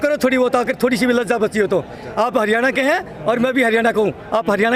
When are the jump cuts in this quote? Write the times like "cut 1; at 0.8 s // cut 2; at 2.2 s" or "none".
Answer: none